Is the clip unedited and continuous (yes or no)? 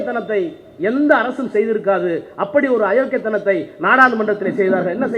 yes